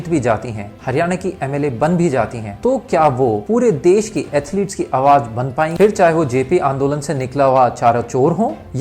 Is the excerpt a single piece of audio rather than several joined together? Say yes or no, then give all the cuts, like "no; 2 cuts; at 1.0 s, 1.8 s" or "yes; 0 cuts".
no; 1 cut; at 5.7 s